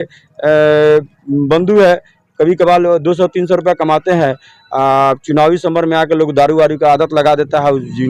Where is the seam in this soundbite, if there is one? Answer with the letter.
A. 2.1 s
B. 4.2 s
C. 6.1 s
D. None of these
D